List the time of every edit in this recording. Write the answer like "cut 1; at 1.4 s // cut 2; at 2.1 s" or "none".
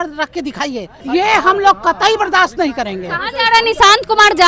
cut 1; at 0.9 s